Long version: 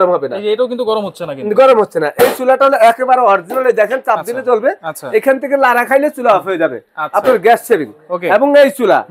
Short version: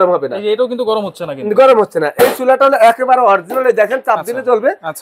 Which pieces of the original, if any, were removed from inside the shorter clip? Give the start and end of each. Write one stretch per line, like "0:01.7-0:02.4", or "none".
none

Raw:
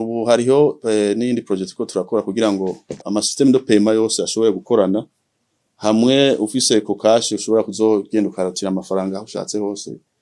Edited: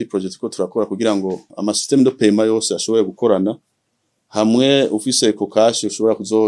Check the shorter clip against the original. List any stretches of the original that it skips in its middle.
0:02.8-0:02.9

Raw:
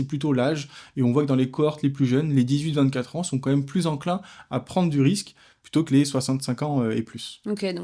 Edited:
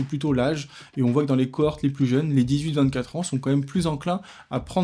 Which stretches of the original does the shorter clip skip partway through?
none

